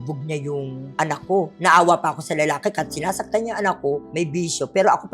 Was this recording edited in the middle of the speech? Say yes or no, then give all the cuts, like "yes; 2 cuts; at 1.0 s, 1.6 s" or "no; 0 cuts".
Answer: yes; 2 cuts; at 1.5 s, 4.1 s